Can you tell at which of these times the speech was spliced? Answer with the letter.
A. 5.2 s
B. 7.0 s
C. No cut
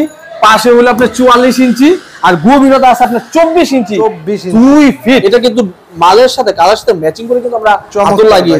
A